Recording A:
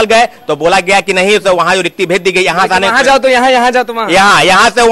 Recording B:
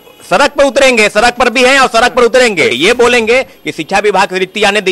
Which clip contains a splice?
B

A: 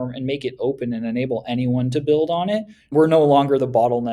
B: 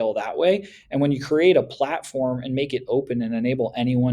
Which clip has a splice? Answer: A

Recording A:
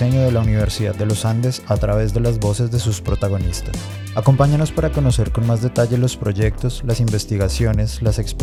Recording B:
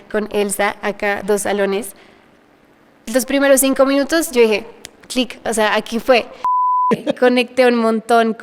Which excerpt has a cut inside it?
B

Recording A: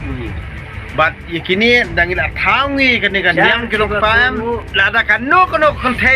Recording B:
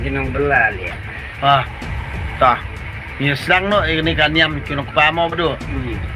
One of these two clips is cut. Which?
A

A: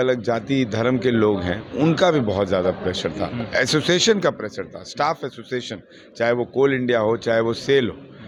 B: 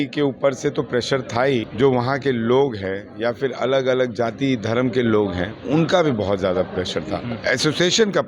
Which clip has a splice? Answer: B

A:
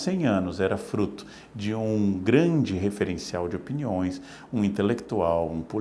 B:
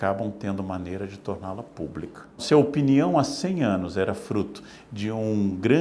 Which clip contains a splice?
B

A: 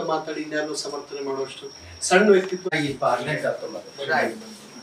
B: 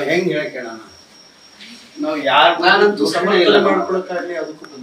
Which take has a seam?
A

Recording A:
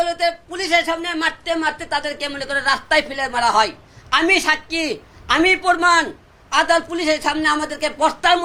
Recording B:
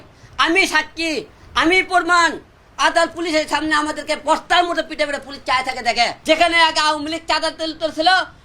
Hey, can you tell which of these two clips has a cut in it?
B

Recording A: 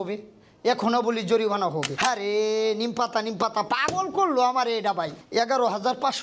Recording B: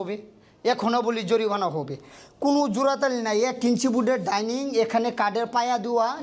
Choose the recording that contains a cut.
A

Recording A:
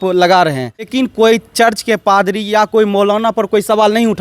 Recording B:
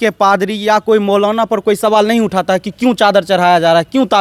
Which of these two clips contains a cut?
A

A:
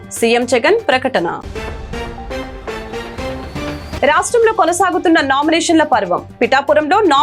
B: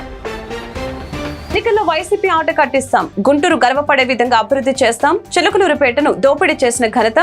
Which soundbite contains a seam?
B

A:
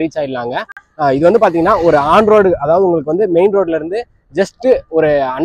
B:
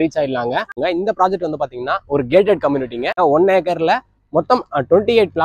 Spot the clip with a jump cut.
B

